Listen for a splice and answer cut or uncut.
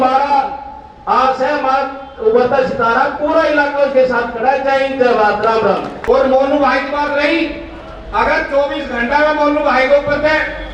uncut